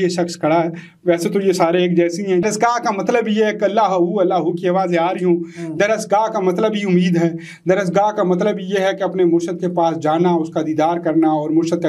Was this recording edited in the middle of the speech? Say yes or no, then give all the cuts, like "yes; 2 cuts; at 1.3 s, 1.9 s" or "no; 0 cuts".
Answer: yes; 1 cut; at 2.4 s